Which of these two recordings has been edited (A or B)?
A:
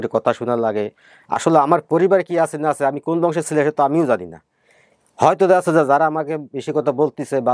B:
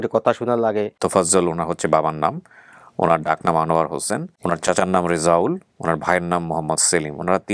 B